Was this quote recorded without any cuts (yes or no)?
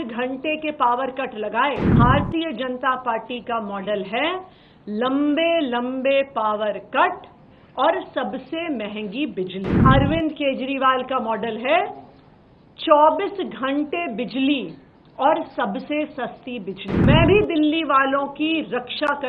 no